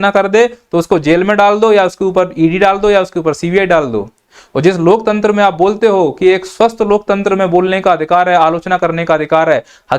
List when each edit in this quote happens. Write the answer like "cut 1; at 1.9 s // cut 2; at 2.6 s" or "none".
cut 1; at 4.2 s